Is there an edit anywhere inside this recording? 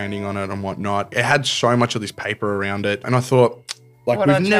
yes; 2 cuts; at 1.1 s, 3.0 s

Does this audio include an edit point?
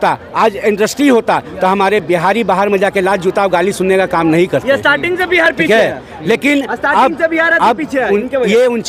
no; 0 cuts

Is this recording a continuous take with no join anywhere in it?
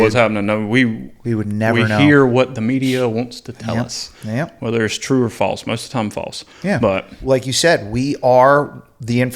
no; 1 cut; at 7.1 s

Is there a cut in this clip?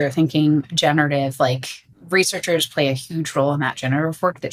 no; 0 cuts

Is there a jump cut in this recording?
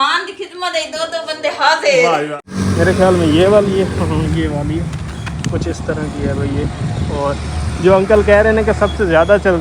yes; 1 cut; at 2.4 s

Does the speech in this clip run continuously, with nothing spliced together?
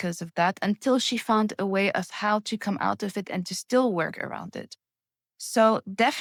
yes; 0 cuts

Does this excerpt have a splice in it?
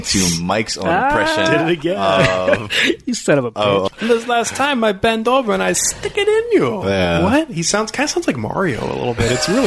yes; 1 cut; at 3.9 s

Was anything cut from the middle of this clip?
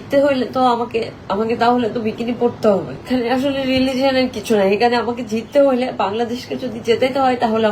yes; 1 cut; at 3.0 s

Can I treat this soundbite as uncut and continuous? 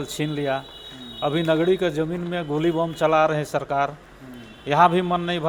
yes; 0 cuts

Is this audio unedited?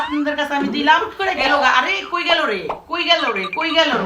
no; 1 cut; at 1.1 s

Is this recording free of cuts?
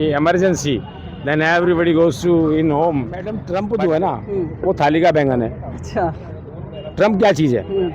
no; 1 cut; at 3.4 s

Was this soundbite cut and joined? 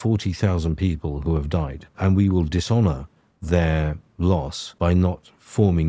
yes; 2 cuts; at 1.9 s, 4.6 s

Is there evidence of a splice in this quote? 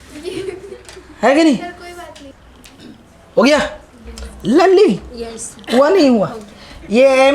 yes; 1 cut; at 2.3 s

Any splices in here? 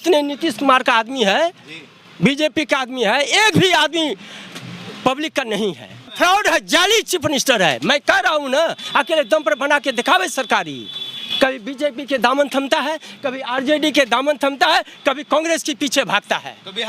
yes; 1 cut; at 6.1 s

